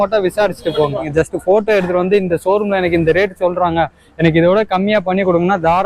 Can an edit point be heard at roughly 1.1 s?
yes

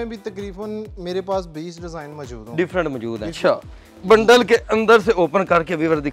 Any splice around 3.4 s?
yes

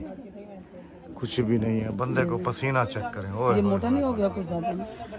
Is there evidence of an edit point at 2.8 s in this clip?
no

